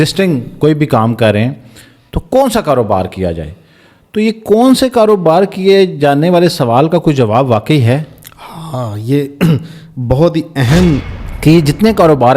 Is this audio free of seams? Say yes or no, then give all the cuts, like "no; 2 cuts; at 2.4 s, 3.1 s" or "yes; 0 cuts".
no; 1 cut; at 11.1 s